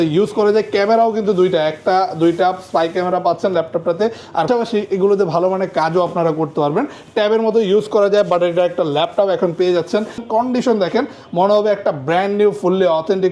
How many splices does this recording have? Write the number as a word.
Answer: two